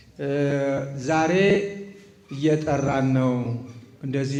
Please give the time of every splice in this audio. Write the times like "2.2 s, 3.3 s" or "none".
none